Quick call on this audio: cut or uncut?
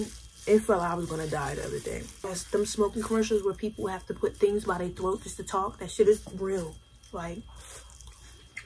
cut